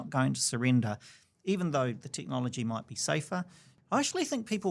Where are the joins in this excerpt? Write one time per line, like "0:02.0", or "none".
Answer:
0:03.7